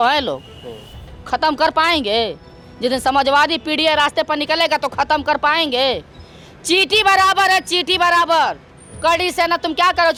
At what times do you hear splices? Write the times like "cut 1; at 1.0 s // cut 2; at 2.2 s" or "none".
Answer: none